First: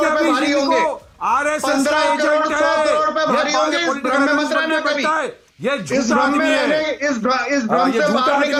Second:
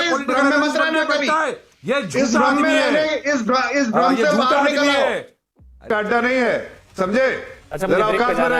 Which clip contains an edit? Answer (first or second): second